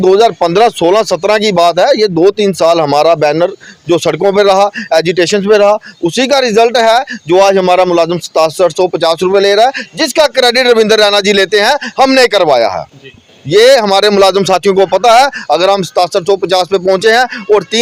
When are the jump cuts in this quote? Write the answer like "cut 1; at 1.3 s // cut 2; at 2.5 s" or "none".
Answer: none